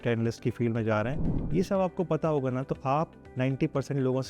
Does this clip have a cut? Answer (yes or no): yes